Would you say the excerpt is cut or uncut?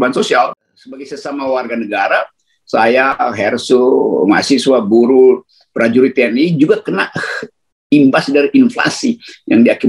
cut